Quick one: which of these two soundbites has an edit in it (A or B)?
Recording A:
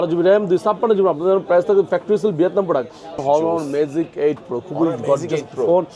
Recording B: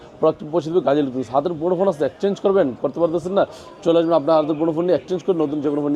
A